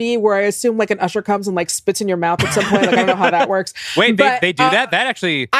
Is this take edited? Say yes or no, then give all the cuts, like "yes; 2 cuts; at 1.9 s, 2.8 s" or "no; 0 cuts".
no; 0 cuts